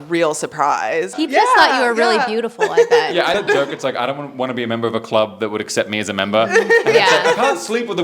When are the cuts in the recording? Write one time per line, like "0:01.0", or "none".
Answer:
0:01.1
0:03.3